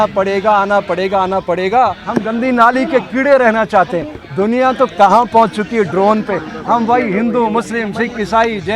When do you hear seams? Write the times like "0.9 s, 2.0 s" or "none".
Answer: 2.0 s